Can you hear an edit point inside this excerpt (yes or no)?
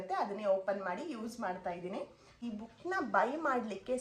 yes